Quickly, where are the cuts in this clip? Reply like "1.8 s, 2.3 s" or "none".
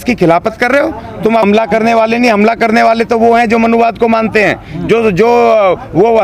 1.4 s

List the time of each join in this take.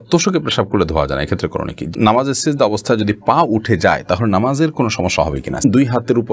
1.9 s, 5.6 s

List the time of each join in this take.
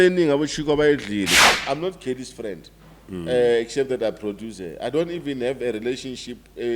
1.4 s

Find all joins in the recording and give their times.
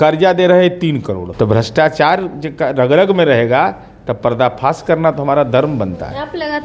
1.3 s

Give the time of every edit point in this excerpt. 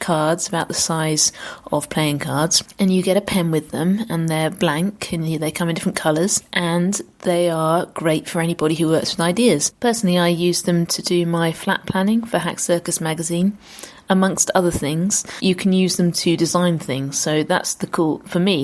none

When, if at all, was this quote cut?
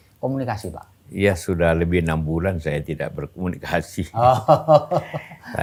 none

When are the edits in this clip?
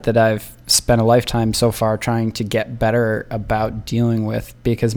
none

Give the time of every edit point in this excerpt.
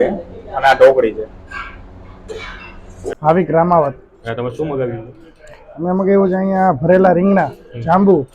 3.1 s

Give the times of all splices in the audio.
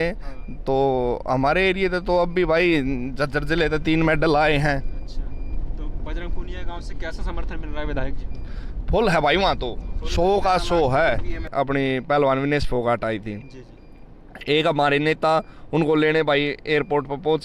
11.4 s

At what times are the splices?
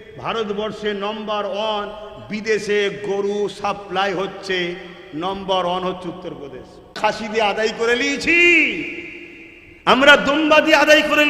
7.0 s

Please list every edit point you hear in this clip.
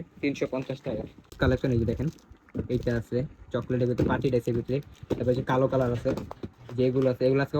1.4 s

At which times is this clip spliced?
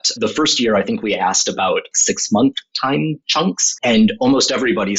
1.9 s, 3.3 s

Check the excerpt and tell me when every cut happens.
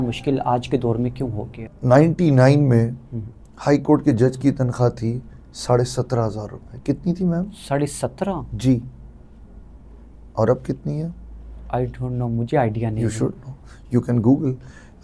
1.7 s

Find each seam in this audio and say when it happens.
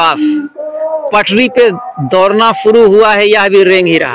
none

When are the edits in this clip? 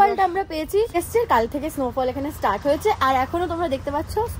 0.9 s

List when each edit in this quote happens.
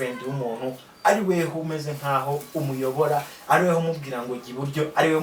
none

